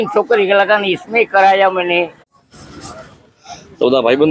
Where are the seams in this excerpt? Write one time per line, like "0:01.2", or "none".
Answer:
0:02.2